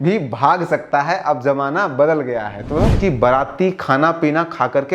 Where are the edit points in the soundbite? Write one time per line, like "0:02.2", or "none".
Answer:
0:02.9